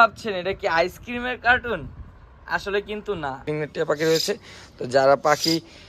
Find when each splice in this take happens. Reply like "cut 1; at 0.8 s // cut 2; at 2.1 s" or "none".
cut 1; at 3.4 s